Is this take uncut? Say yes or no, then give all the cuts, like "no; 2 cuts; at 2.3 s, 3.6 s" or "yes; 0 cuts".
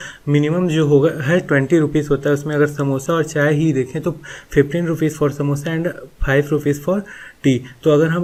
yes; 0 cuts